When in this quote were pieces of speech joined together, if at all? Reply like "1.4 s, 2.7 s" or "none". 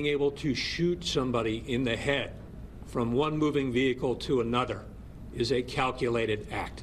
1.3 s

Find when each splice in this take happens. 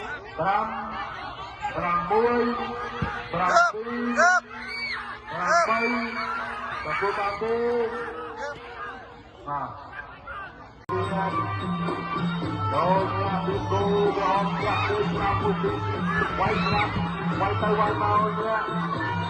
10.9 s

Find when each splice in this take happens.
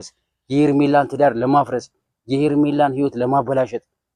none

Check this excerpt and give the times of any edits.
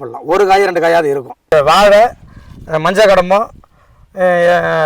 1.3 s

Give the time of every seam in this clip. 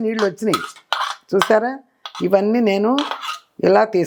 none

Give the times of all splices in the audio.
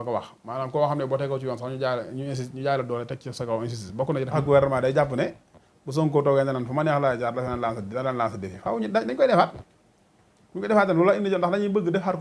4.4 s

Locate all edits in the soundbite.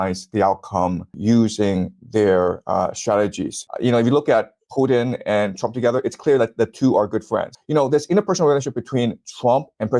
3.6 s, 7.5 s

